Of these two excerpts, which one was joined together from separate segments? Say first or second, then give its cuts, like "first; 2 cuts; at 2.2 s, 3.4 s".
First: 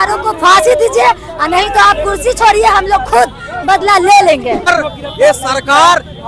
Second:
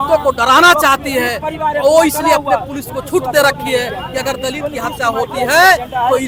first; 1 cut; at 4.7 s